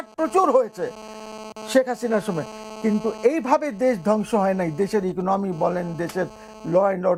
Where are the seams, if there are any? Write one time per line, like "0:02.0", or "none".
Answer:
none